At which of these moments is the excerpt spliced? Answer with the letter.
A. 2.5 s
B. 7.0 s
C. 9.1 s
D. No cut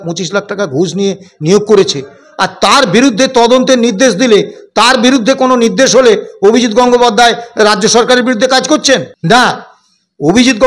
C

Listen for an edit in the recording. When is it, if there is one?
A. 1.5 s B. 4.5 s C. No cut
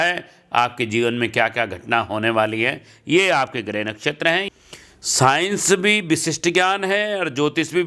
B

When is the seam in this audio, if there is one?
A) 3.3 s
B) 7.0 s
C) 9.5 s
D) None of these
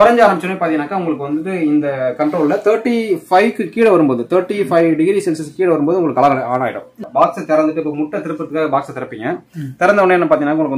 B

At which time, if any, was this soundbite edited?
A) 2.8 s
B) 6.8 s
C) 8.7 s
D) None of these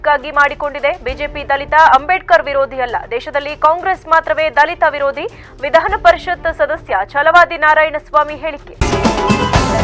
C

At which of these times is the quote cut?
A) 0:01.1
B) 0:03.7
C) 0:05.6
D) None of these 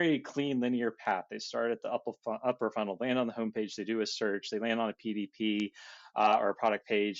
D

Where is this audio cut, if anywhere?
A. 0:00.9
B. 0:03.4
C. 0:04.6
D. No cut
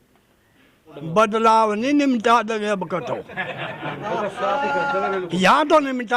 A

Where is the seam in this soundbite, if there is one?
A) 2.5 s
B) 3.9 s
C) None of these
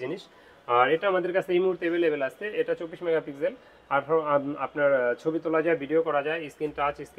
C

